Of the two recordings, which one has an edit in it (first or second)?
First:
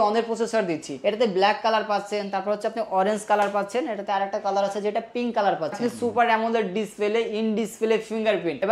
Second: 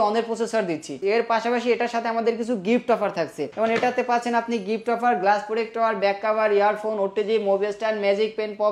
first